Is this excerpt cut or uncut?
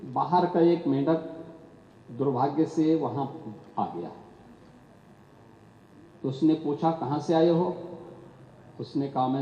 uncut